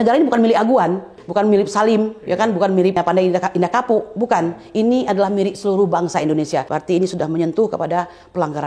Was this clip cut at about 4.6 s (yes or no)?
no